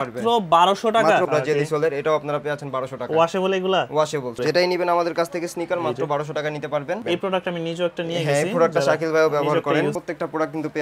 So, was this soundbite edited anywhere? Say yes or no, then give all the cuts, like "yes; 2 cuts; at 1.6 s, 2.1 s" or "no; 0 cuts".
yes; 4 cuts; at 1.3 s, 4.4 s, 7.0 s, 10.0 s